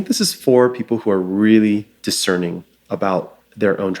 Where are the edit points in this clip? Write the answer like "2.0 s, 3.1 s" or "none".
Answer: 1.9 s

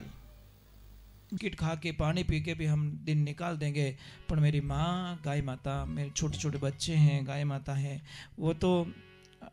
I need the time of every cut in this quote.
1.3 s

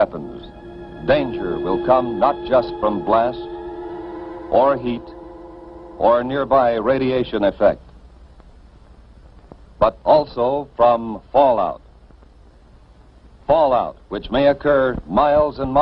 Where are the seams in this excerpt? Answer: 6.9 s

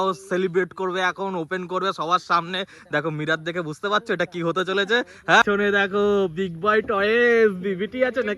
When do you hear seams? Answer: 5.4 s

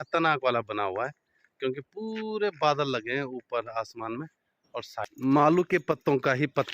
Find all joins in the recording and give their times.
5.0 s

